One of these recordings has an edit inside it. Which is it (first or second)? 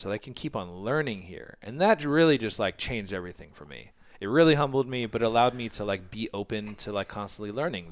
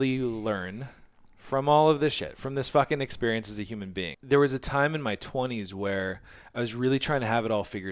second